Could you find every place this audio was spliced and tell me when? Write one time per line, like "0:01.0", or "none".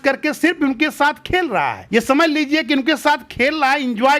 none